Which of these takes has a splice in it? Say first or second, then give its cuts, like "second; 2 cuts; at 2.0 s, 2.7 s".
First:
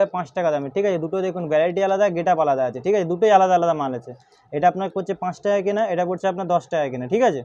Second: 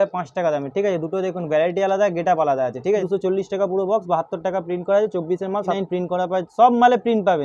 second; 2 cuts; at 3.0 s, 5.7 s